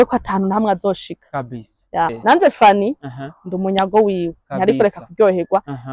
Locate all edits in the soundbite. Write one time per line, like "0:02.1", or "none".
0:02.2